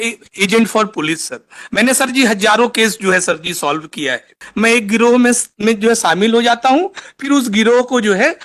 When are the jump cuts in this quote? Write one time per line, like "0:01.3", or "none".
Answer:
0:04.4

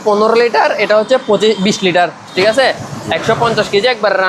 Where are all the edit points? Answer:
0:02.3

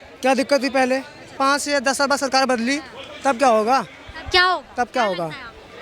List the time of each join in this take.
0:01.3

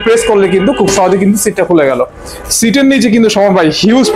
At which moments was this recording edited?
none

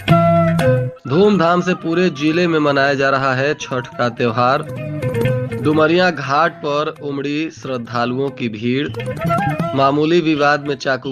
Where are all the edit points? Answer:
0:01.0

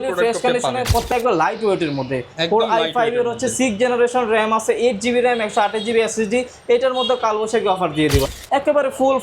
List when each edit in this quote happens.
0:01.1
0:08.3

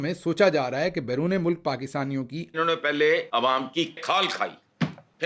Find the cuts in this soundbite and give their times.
0:02.6
0:04.0

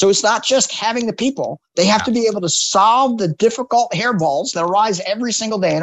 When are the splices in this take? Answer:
none

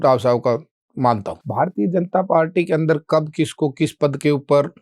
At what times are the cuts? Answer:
0:01.3

